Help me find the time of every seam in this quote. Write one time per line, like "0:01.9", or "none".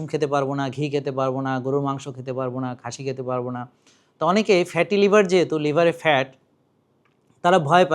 none